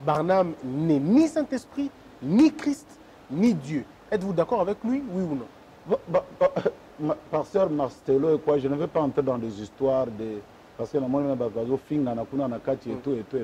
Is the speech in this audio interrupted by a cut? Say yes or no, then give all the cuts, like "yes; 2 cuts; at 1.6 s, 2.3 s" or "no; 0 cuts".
no; 0 cuts